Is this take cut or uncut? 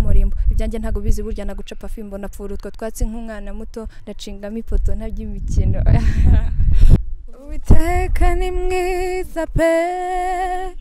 cut